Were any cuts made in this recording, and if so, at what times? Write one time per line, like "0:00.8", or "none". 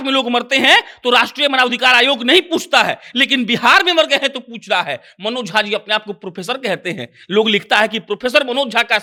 none